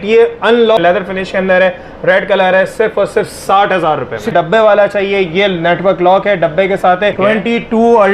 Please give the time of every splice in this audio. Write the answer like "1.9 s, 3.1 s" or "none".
0.8 s, 4.3 s, 7.2 s